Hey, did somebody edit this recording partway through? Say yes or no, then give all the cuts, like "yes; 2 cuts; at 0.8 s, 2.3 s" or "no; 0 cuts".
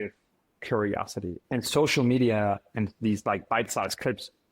yes; 1 cut; at 1.4 s